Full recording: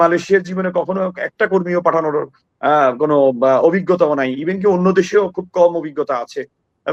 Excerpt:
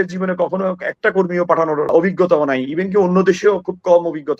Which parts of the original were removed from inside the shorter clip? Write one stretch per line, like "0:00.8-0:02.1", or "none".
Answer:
0:02.3-0:03.6